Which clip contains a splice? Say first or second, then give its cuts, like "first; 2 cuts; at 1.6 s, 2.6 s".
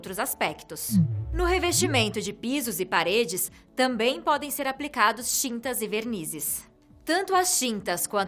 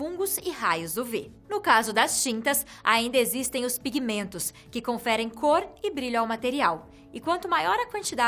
first; 1 cut; at 4.2 s